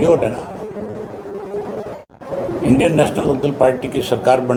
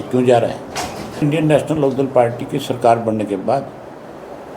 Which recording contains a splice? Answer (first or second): second